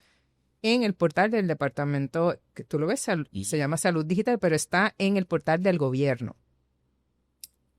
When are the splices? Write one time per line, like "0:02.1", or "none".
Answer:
none